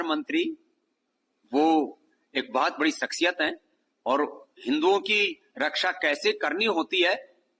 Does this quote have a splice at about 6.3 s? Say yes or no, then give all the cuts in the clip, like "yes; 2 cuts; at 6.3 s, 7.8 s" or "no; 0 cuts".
no; 0 cuts